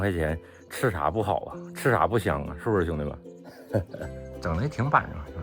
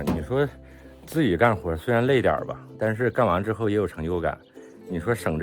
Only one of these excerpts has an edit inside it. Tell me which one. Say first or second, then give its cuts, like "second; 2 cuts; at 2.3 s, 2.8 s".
first; 1 cut; at 4.2 s